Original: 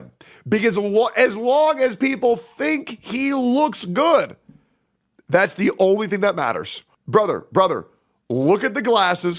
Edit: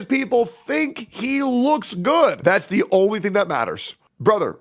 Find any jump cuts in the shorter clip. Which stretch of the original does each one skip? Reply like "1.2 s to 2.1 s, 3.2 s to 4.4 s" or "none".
4.3 s to 5.2 s